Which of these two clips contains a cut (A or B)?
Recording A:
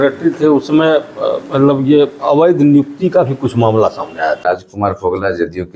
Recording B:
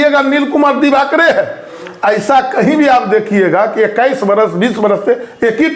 A